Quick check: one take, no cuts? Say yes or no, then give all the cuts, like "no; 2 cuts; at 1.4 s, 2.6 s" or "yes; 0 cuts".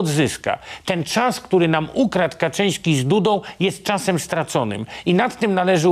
yes; 0 cuts